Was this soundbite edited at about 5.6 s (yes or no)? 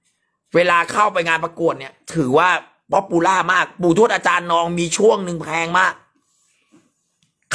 no